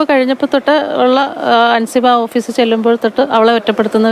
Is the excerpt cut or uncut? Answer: uncut